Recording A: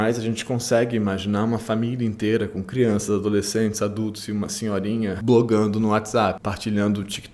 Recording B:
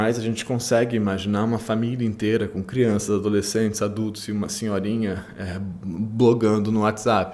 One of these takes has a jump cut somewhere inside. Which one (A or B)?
A